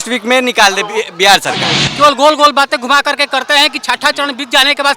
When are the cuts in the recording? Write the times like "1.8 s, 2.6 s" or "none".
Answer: 1.8 s